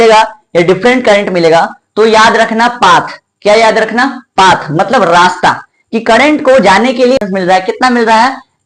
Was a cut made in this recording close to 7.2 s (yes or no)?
yes